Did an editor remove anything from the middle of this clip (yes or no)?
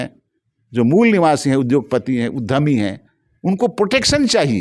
no